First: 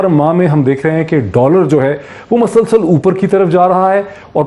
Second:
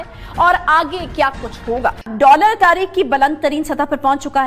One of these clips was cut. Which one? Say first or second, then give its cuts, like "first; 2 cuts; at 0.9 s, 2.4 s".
second; 1 cut; at 2.0 s